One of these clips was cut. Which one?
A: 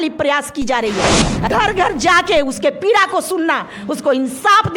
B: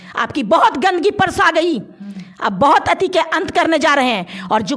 A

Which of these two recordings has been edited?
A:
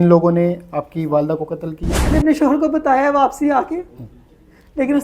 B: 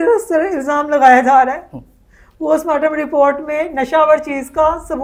A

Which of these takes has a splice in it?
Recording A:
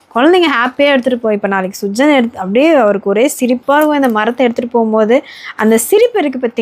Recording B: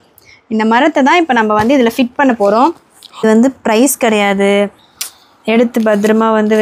B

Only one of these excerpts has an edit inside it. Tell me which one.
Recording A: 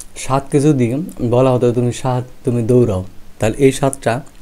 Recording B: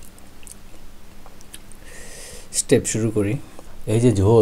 B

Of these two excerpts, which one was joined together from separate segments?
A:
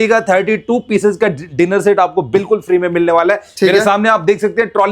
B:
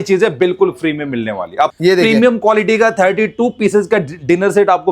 B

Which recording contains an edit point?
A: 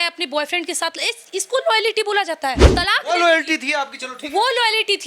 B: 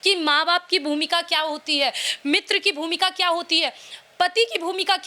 A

